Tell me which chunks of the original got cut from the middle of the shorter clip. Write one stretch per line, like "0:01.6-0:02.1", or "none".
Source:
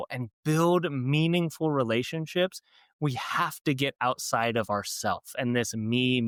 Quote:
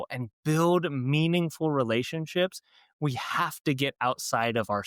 none